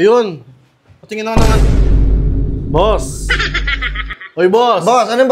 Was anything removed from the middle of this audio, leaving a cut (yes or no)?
no